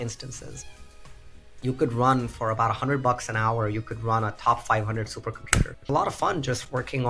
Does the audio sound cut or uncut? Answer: cut